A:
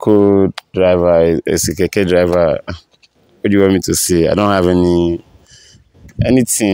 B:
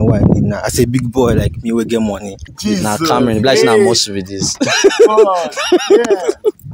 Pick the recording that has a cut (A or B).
B